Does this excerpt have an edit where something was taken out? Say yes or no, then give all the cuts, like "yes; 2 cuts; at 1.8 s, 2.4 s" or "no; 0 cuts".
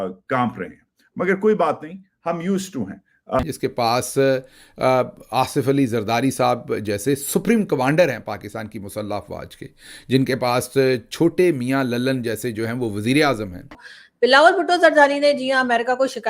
no; 0 cuts